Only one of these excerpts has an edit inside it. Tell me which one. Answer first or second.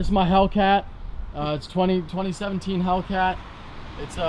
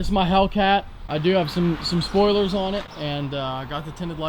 second